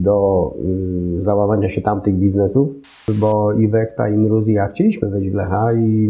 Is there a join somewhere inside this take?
yes; 1 cut; at 3.0 s

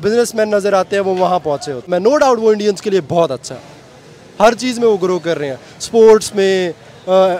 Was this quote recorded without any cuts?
no; 1 cut; at 1.9 s

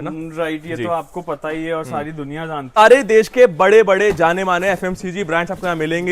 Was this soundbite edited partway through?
yes; 1 cut; at 2.8 s

